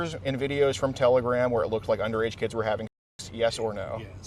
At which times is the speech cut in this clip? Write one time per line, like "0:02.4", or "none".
none